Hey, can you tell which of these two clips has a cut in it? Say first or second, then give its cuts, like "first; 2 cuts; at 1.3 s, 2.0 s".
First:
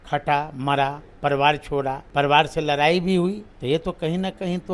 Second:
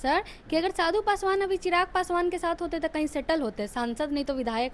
first; 2 cuts; at 2.0 s, 3.5 s